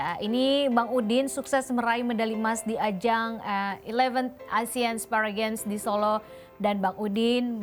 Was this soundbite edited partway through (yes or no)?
no